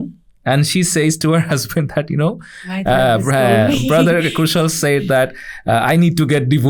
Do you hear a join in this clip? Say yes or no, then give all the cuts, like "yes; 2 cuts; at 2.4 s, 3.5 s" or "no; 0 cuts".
no; 0 cuts